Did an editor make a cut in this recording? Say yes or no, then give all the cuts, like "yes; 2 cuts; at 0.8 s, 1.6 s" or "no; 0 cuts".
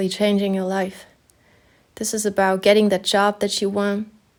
no; 0 cuts